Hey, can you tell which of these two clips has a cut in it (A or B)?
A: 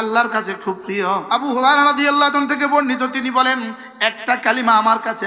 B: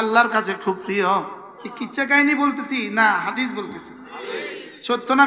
A